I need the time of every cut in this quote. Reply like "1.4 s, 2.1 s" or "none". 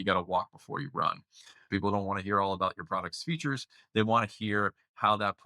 1.6 s